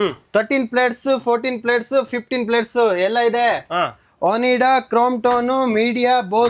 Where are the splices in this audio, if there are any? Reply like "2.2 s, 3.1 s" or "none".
none